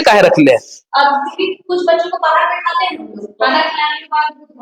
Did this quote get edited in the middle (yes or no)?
no